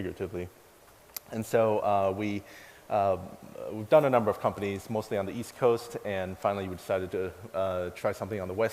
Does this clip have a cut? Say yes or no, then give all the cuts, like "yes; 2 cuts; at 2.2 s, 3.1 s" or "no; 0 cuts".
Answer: yes; 1 cut; at 6.8 s